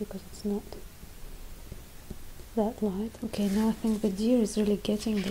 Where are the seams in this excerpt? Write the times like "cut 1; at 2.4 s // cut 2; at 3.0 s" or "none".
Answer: cut 1; at 3.1 s